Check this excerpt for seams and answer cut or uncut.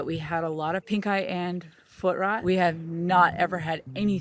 cut